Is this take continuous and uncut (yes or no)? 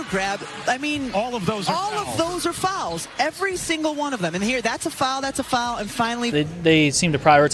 no